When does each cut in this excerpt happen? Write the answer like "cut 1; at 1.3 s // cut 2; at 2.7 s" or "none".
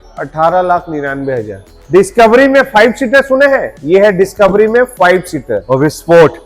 cut 1; at 1.6 s